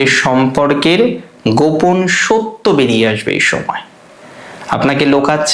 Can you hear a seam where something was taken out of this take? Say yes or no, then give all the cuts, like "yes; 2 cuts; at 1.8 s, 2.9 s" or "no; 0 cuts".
no; 0 cuts